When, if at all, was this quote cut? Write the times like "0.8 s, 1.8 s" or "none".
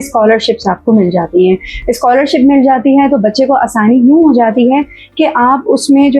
none